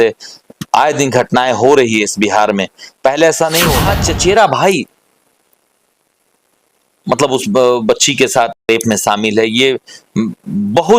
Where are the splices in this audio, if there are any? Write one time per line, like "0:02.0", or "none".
0:03.9